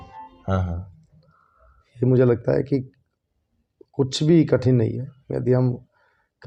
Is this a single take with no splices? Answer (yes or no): yes